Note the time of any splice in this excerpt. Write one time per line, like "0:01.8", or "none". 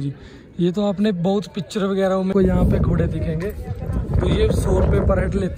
0:02.3